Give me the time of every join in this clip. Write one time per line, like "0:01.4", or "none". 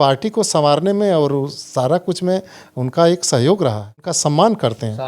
0:04.1